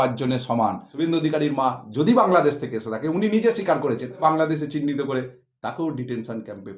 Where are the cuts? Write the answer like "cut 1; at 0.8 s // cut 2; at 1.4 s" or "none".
cut 1; at 0.9 s // cut 2; at 4.2 s